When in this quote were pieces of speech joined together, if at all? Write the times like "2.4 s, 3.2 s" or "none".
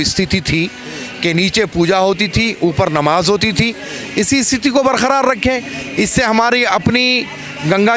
none